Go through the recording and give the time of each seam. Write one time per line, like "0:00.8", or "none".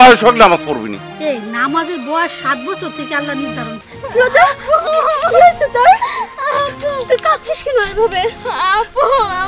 0:03.8